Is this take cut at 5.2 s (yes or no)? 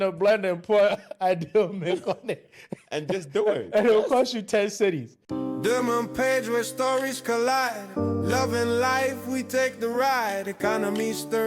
yes